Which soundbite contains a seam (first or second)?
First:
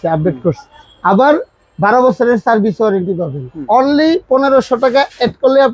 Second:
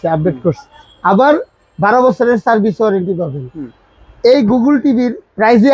first